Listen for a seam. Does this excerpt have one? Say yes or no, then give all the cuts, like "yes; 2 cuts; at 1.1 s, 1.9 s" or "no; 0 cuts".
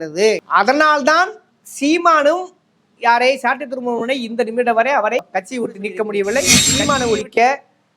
yes; 1 cut; at 6.6 s